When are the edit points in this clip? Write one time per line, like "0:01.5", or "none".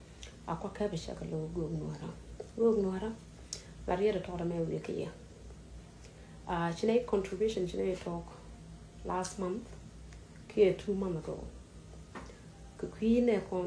none